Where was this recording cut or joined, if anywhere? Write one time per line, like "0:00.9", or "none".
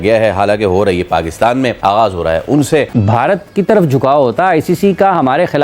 0:02.9